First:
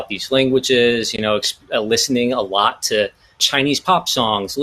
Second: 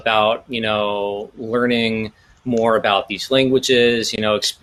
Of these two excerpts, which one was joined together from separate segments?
first; 1 cut; at 3.4 s

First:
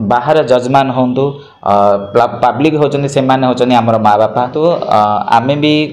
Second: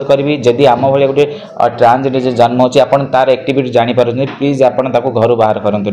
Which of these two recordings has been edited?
first; 1 cut; at 4.5 s

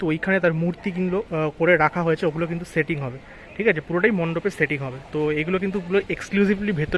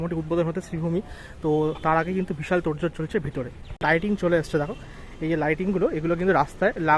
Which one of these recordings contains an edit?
second; 1 cut; at 3.8 s

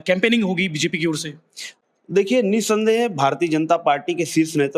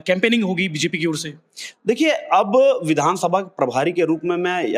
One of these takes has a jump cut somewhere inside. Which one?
first; 1 cut; at 1.7 s

